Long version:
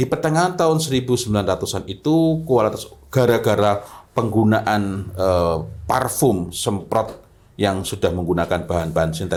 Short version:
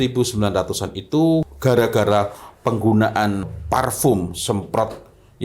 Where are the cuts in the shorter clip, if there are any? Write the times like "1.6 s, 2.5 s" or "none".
1.5 s, 3.5 s